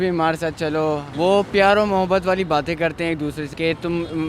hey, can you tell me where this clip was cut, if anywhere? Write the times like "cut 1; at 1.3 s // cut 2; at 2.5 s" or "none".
cut 1; at 1.1 s // cut 2; at 3.4 s